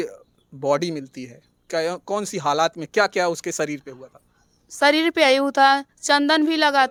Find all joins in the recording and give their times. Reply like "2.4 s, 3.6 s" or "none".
none